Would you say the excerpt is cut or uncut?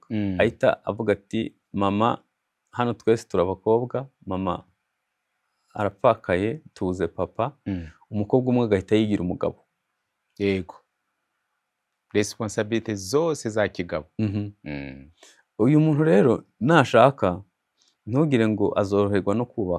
uncut